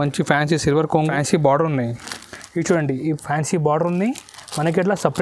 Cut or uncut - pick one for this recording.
cut